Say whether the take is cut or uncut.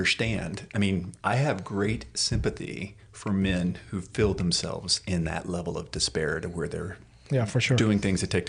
uncut